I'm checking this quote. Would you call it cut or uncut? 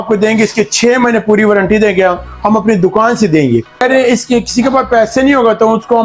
cut